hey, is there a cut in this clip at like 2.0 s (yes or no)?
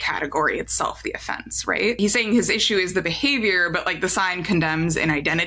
yes